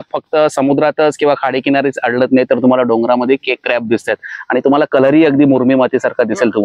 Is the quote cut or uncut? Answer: uncut